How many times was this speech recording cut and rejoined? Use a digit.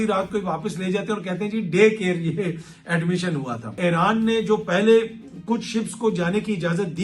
1